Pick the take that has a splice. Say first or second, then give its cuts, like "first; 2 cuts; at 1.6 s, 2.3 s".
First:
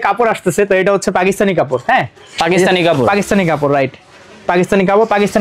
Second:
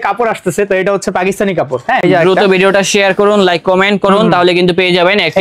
second; 1 cut; at 2.0 s